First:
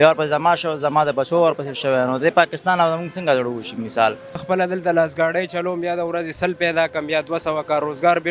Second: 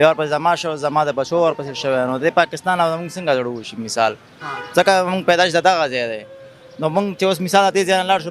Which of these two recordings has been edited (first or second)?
first